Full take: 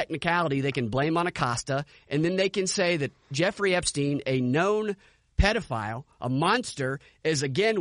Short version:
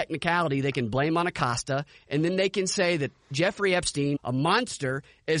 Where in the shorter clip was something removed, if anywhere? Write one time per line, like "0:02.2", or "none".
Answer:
0:04.2